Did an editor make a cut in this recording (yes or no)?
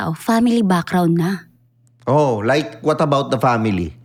no